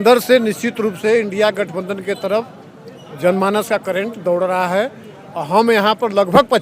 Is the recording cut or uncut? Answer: uncut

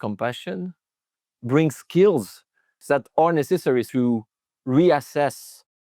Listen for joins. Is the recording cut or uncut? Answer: cut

